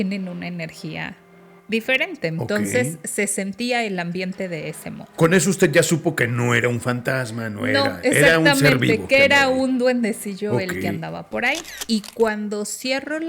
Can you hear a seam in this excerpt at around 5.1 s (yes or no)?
no